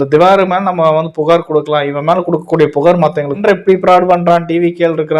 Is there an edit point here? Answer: yes; 1 cut; at 3.4 s

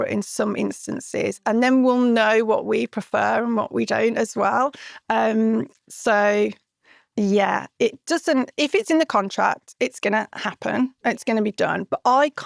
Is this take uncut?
yes; 0 cuts

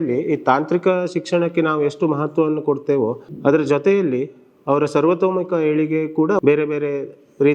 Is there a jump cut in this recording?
yes; 1 cut; at 6.4 s

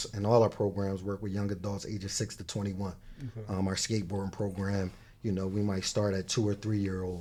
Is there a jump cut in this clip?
no; 0 cuts

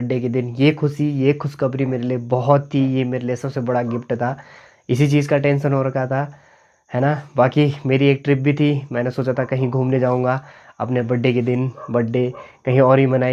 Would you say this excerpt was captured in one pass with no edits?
yes; 0 cuts

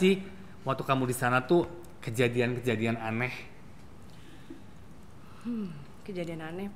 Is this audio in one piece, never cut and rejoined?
yes; 0 cuts

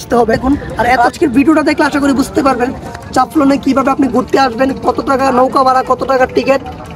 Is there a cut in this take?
yes; 1 cut; at 1.0 s

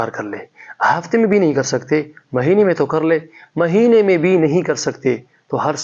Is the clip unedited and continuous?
yes; 0 cuts

